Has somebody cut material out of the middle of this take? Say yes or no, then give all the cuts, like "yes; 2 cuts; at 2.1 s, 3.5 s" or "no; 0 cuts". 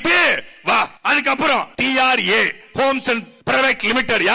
yes; 3 cuts; at 1.0 s, 1.7 s, 3.3 s